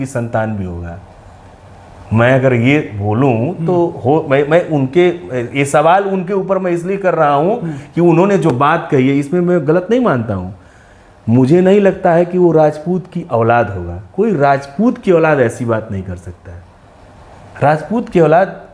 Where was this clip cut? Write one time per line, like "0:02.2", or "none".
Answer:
none